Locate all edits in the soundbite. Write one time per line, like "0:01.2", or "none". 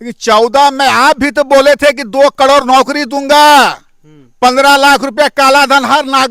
none